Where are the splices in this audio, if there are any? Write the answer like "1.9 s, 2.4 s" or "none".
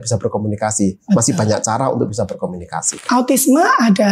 3.0 s